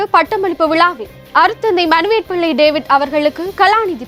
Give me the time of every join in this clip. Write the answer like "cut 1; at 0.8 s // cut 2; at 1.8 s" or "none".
none